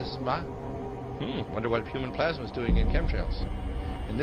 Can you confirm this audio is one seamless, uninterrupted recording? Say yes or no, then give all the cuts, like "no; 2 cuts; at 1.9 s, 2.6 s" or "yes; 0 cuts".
yes; 0 cuts